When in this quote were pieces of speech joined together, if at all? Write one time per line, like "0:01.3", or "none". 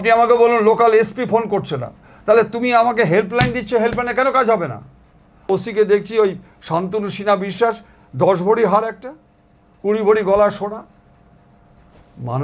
0:05.5